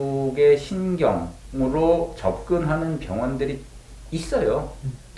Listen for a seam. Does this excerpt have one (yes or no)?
no